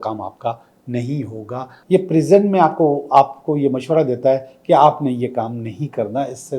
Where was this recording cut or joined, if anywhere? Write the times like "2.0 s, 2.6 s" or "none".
1.8 s